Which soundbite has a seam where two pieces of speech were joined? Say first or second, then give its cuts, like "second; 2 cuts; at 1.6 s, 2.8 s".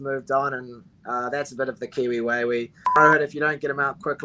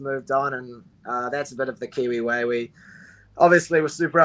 first; 1 cut; at 3.0 s